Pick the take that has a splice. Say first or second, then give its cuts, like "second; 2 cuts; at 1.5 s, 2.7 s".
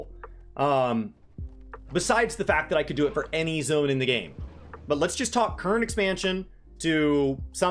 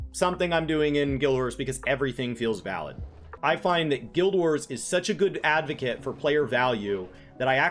second; 1 cut; at 3.3 s